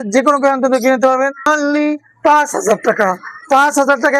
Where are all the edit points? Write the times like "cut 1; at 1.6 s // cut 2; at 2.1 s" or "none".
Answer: cut 1; at 1.5 s